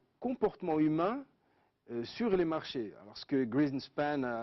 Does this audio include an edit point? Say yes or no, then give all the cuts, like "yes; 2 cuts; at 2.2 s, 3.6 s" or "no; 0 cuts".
yes; 1 cut; at 3.0 s